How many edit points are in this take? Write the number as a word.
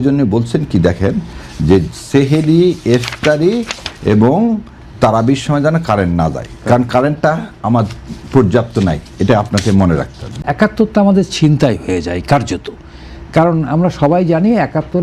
one